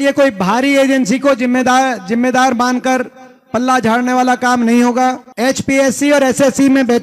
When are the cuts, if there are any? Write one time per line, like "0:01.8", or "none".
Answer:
none